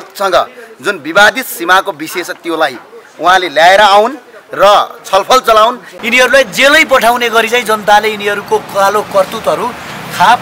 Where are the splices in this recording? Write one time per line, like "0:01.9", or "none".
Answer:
0:05.9

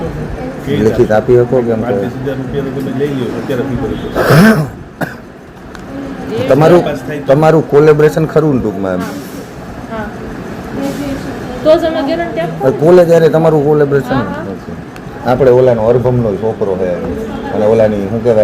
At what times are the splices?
none

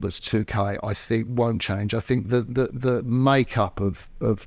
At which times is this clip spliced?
none

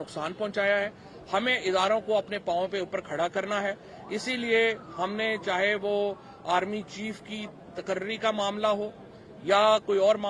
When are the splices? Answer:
none

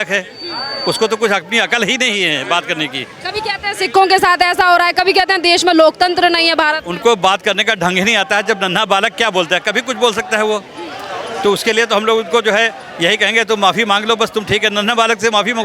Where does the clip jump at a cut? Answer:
none

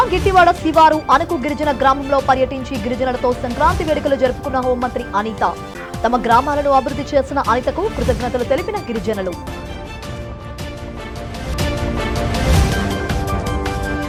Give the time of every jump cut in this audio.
none

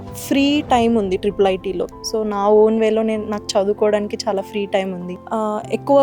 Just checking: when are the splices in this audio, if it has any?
0:01.9
0:05.1

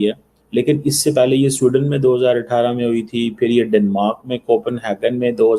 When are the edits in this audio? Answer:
none

